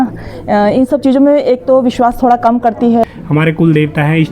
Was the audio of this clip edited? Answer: yes; 1 cut; at 3.0 s

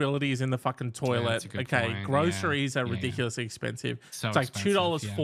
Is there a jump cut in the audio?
no; 0 cuts

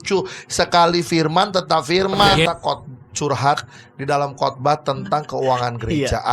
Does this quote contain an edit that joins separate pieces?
yes; 1 cut; at 2.4 s

